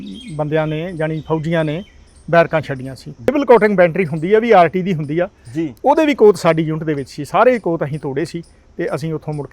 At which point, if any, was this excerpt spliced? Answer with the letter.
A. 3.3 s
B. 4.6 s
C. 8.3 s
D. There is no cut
A